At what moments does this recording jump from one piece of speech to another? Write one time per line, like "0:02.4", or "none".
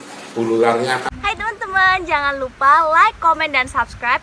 0:01.1